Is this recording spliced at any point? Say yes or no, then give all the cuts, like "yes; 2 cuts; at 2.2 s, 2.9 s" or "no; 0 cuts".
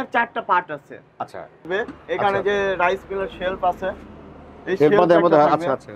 yes; 1 cut; at 1.7 s